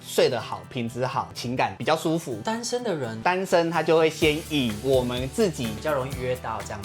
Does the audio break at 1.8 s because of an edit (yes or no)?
yes